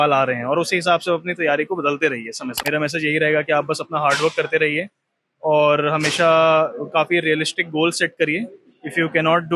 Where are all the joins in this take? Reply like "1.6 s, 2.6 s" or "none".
2.5 s